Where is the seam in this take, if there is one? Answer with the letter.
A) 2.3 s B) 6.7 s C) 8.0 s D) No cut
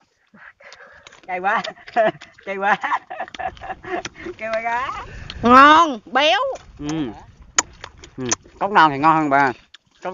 B